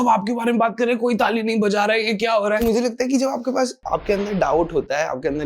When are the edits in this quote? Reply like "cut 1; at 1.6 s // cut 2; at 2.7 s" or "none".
cut 1; at 2.6 s